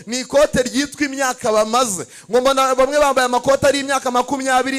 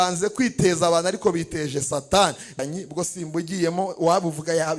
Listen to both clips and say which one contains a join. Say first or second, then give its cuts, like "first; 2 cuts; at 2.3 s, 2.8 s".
second; 1 cut; at 2.6 s